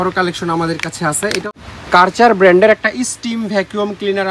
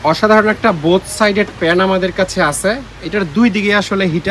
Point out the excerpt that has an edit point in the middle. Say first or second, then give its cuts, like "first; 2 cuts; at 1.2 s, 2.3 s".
first; 1 cut; at 1.4 s